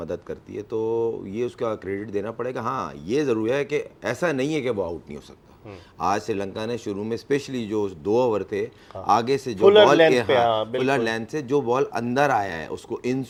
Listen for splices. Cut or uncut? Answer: uncut